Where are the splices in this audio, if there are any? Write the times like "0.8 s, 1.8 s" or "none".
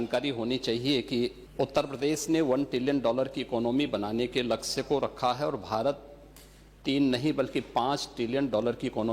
1.4 s